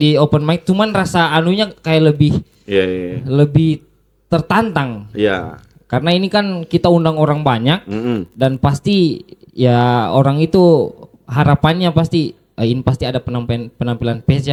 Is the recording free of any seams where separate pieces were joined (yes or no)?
yes